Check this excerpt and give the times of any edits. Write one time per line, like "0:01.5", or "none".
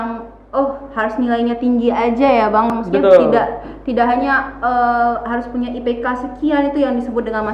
0:02.7